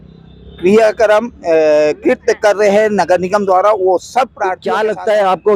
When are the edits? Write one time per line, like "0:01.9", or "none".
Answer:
0:04.5